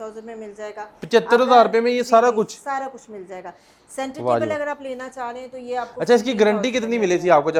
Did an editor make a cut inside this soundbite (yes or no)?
no